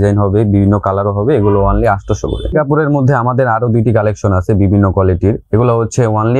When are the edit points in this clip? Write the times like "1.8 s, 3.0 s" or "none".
2.4 s